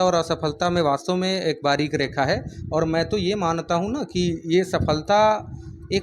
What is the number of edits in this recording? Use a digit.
0